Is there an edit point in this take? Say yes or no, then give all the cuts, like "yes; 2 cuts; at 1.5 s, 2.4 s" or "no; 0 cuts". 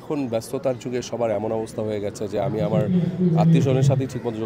no; 0 cuts